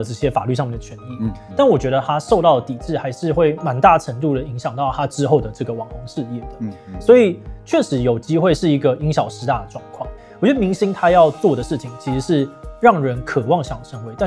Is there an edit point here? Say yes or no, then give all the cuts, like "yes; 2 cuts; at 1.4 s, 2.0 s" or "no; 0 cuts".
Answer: yes; 1 cut; at 10.1 s